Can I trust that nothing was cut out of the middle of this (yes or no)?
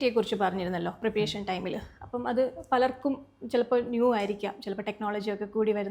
yes